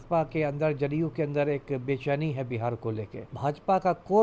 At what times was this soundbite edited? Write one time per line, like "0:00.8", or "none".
0:03.3